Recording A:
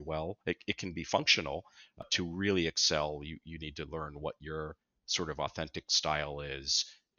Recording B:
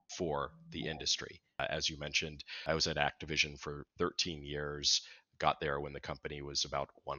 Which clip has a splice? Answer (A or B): B